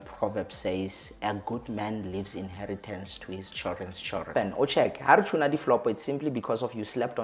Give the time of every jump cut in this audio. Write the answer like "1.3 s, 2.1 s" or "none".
4.3 s